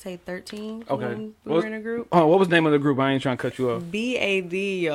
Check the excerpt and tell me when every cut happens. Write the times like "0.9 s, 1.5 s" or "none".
none